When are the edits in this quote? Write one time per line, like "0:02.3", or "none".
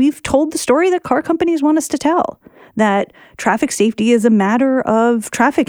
none